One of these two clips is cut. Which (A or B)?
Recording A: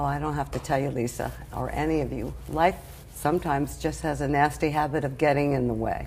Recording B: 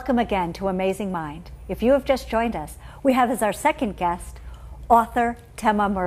B